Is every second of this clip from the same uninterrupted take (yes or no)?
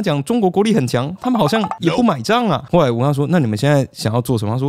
yes